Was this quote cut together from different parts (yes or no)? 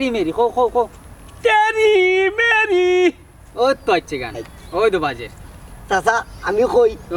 no